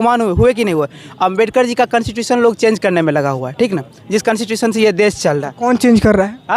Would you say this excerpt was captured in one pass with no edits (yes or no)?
yes